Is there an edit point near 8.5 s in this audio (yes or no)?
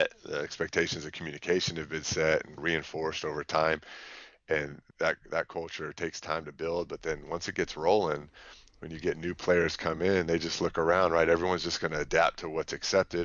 no